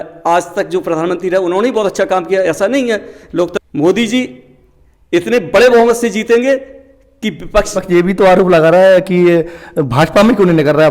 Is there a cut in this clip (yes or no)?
yes